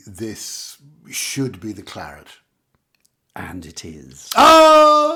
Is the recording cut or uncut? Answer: uncut